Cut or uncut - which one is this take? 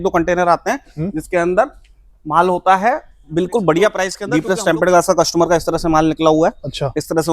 cut